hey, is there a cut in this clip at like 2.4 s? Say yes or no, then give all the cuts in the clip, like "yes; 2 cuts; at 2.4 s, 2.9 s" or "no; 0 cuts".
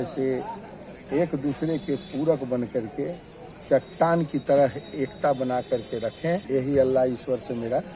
no; 1 cut; at 6.4 s